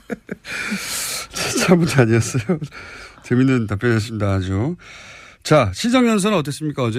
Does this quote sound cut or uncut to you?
uncut